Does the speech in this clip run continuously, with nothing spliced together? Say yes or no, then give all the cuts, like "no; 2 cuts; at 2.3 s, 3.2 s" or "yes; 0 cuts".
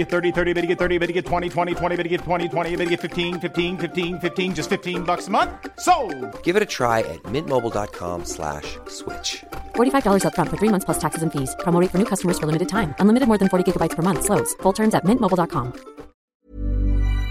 no; 1 cut; at 16.3 s